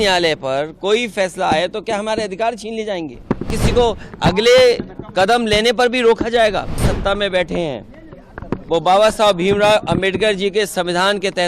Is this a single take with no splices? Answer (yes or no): no